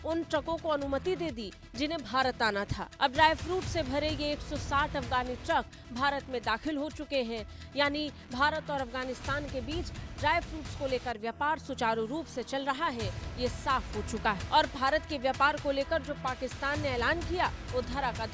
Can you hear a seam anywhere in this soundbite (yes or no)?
no